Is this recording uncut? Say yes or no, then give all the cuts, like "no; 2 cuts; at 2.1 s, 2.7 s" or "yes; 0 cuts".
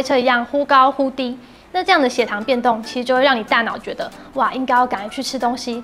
yes; 0 cuts